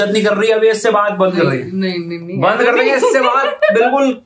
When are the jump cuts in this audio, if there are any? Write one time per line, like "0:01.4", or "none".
none